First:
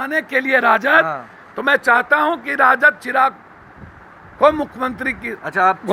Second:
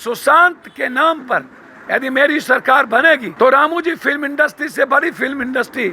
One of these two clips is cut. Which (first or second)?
second